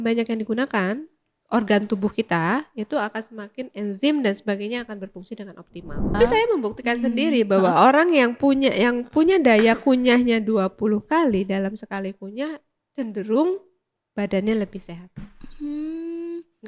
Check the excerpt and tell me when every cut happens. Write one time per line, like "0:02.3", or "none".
0:06.2

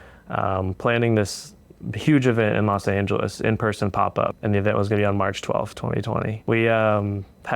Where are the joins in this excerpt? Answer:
0:04.4
0:06.3

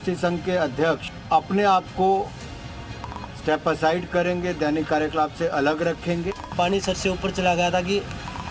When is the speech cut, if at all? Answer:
0:01.1
0:06.4

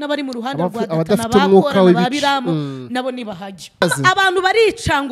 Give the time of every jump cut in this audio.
0:03.8

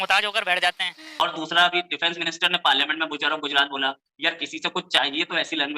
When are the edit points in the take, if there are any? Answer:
0:01.2

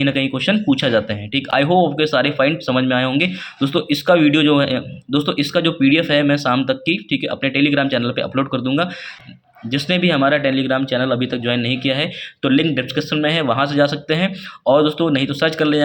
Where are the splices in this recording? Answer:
none

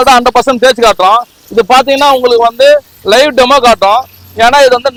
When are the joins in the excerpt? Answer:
none

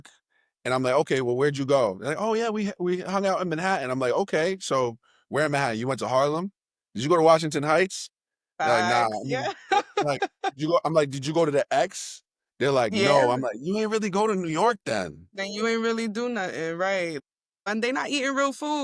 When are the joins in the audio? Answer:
0:17.7

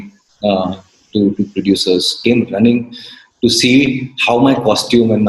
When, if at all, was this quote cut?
0:02.1

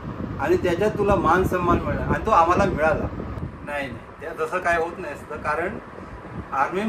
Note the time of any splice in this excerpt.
0:03.4

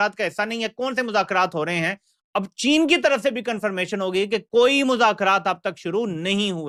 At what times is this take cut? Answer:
none

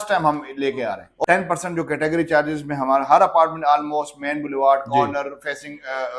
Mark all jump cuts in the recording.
0:01.1

